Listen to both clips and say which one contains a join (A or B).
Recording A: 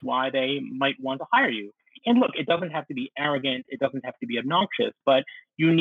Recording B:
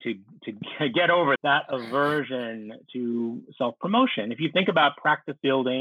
B